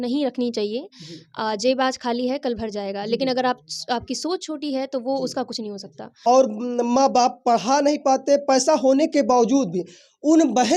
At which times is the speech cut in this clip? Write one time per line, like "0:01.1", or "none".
0:06.1